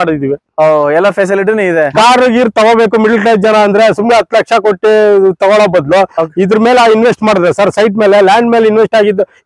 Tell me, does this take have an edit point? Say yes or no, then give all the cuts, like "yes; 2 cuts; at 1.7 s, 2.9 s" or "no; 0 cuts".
yes; 1 cut; at 1.9 s